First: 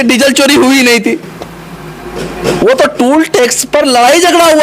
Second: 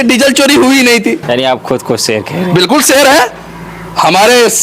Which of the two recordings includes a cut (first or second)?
second